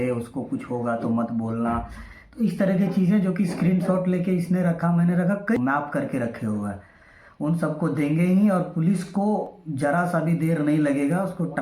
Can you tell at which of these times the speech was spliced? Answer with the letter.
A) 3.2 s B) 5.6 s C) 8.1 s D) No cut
B